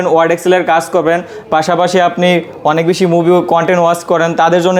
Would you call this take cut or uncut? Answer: uncut